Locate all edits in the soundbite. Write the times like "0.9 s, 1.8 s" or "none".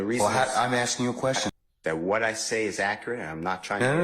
1.5 s

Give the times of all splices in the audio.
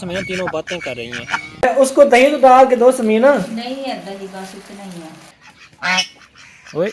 1.6 s, 5.4 s

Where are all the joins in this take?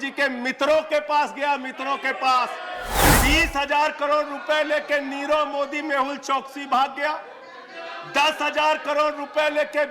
3.1 s

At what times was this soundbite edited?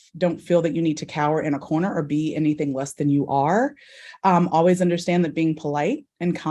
none

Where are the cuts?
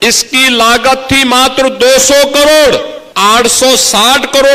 3.0 s

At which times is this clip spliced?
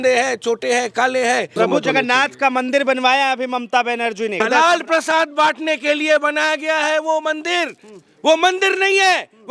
1.6 s, 4.4 s

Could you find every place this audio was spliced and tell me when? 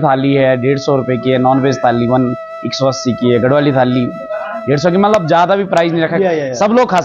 none

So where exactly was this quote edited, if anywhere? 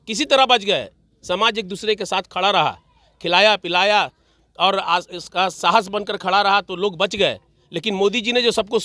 none

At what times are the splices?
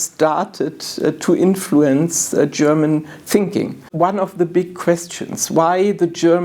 3.9 s

